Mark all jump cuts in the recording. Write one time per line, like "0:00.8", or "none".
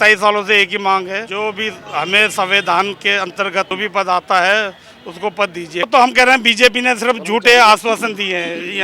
0:01.3
0:03.7
0:05.9